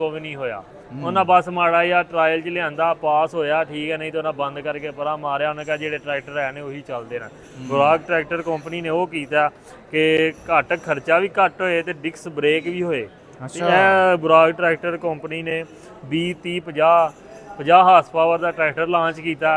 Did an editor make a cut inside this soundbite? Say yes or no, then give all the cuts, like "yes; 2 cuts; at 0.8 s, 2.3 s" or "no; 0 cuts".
no; 0 cuts